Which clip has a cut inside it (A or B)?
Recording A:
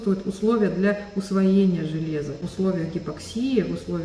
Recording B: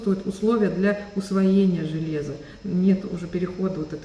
A